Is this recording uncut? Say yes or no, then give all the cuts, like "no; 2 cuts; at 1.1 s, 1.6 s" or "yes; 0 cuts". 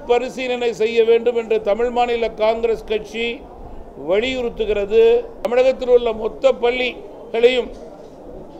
no; 1 cut; at 5.4 s